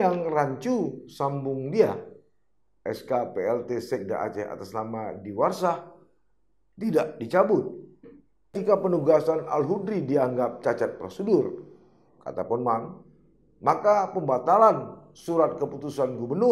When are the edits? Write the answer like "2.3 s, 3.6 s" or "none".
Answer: 8.6 s